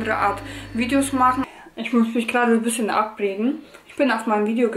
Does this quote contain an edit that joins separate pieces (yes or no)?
yes